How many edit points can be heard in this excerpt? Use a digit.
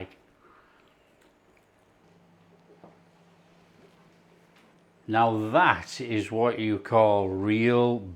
1